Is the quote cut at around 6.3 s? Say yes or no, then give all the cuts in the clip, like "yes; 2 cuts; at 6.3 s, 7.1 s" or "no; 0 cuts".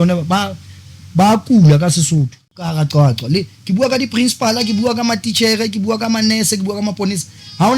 no; 1 cut; at 2.7 s